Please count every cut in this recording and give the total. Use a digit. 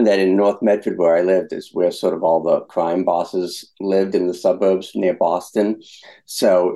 2